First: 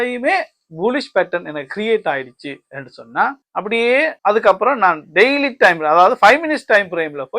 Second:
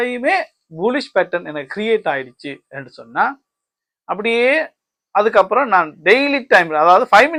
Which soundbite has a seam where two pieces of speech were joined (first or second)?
first